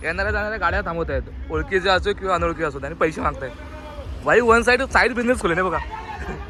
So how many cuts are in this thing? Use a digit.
0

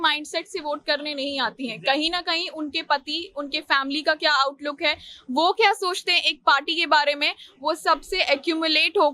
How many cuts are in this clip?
0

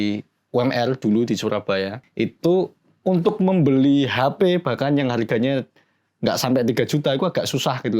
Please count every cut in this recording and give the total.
1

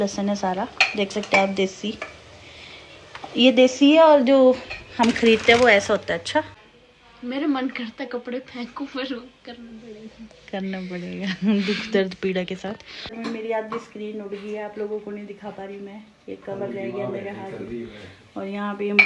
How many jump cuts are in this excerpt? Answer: 2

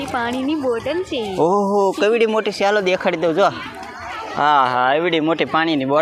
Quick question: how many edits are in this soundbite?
0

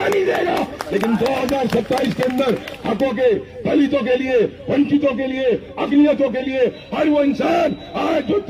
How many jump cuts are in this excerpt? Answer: 0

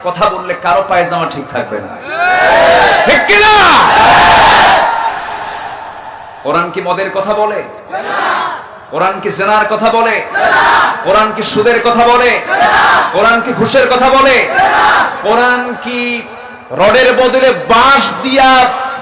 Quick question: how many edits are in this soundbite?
0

